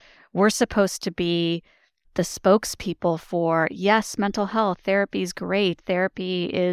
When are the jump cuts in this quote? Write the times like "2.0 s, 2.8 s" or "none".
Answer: 2.1 s